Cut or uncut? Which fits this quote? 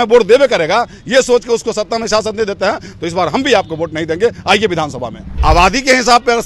cut